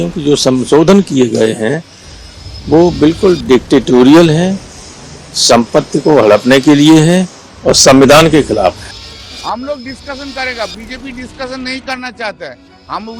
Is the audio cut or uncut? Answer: cut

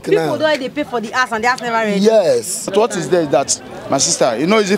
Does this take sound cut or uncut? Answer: cut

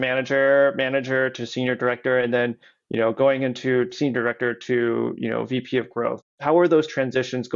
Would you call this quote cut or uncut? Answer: cut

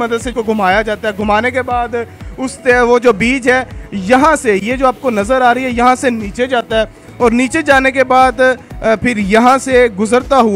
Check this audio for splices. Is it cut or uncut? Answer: uncut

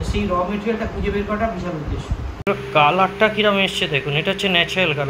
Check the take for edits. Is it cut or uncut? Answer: cut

